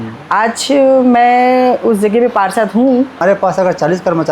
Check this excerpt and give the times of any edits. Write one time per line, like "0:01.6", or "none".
0:03.2